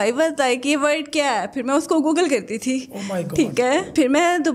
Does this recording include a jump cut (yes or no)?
no